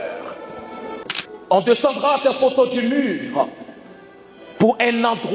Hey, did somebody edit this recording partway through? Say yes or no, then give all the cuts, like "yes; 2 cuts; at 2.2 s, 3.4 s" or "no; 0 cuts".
yes; 1 cut; at 1.0 s